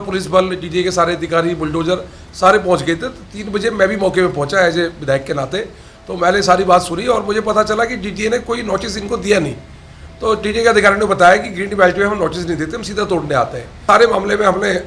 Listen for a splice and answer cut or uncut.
cut